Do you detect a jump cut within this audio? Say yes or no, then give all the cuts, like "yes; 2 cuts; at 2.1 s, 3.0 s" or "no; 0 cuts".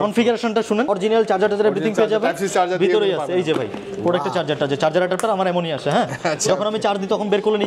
yes; 1 cut; at 0.9 s